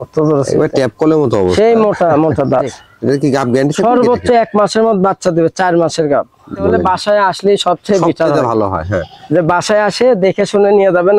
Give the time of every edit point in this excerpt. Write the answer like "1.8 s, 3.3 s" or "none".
2.8 s, 6.8 s